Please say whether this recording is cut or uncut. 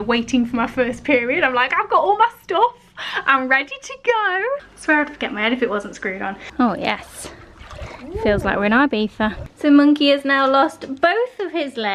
cut